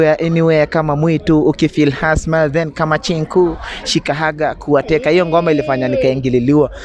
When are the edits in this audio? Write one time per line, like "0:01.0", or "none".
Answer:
none